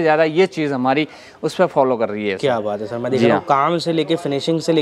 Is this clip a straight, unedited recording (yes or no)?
yes